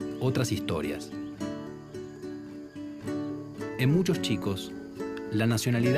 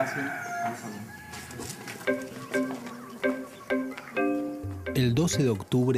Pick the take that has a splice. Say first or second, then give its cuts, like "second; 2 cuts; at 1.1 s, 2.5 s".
first; 1 cut; at 1.4 s